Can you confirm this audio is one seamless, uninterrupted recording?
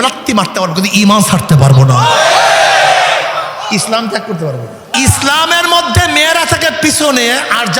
no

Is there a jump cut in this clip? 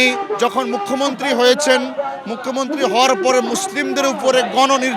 no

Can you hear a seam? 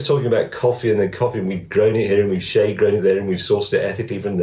no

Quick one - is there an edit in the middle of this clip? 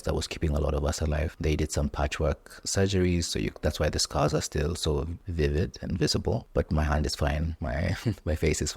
yes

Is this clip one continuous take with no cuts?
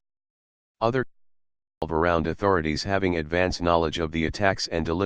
no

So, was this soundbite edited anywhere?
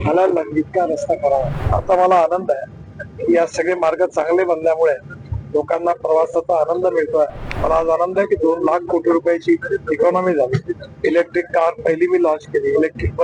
yes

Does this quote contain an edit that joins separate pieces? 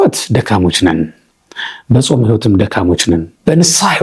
no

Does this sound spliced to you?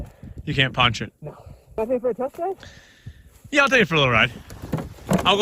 yes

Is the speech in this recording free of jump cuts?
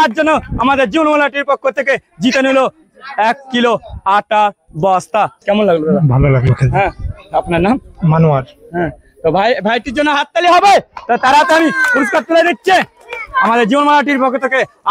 no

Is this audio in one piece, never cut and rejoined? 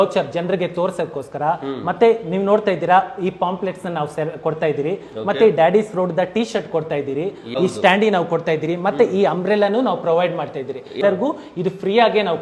no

